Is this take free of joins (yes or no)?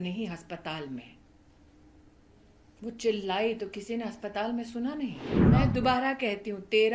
no